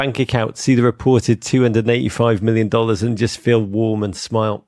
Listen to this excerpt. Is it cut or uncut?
uncut